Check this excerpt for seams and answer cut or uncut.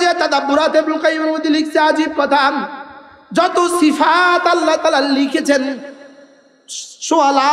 uncut